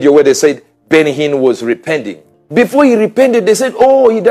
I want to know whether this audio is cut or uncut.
cut